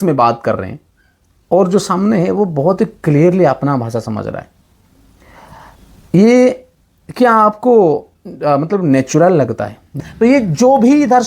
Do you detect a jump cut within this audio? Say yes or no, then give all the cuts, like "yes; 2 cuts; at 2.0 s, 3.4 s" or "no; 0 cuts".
yes; 1 cut; at 9.8 s